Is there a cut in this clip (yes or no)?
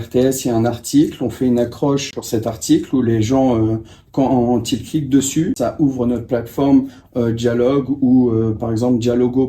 yes